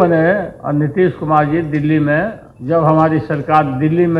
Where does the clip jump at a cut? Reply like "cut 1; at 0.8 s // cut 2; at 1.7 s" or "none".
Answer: cut 1; at 2.5 s